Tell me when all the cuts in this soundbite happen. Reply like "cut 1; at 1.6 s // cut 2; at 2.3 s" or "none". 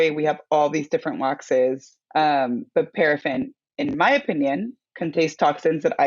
cut 1; at 1.9 s // cut 2; at 4.8 s

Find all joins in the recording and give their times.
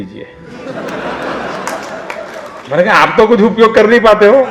cut 1; at 2.5 s

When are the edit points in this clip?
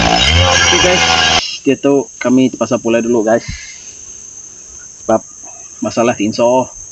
cut 1; at 1.4 s

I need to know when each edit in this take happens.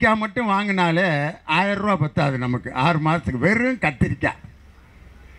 none

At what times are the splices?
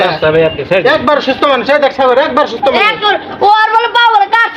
none

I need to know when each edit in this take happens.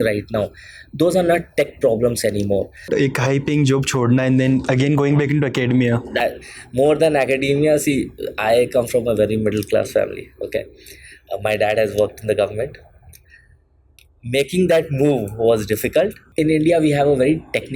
cut 1; at 2.9 s // cut 2; at 16.2 s

